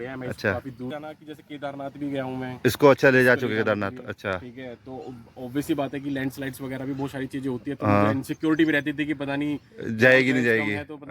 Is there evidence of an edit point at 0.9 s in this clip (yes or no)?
yes